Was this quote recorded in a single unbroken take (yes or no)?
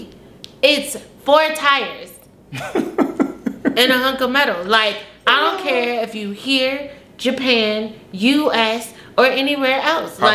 yes